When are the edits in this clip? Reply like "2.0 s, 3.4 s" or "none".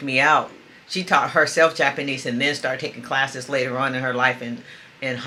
none